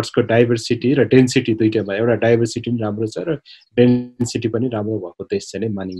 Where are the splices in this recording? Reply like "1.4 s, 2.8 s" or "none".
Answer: none